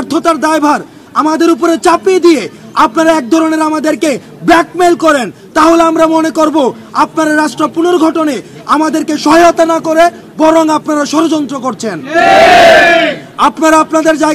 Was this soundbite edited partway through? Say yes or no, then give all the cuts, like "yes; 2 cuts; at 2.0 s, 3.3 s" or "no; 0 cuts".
no; 0 cuts